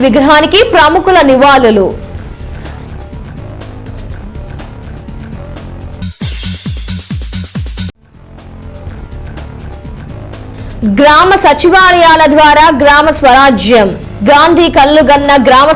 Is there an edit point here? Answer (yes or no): yes